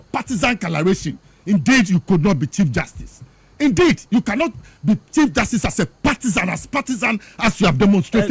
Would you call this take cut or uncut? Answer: uncut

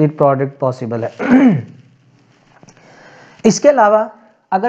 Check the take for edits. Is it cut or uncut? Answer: uncut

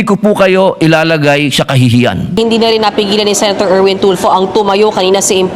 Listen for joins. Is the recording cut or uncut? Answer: cut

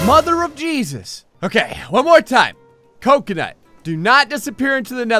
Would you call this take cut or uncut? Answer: cut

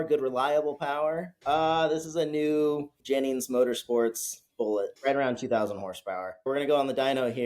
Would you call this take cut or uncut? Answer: cut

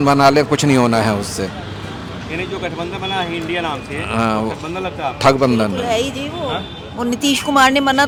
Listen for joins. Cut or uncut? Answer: uncut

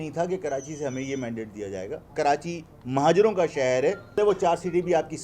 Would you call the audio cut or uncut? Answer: cut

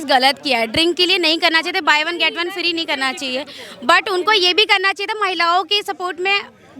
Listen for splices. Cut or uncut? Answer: uncut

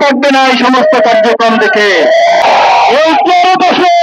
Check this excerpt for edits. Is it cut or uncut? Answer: cut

